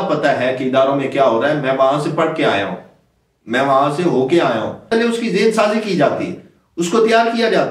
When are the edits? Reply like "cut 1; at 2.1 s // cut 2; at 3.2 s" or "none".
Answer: cut 1; at 4.9 s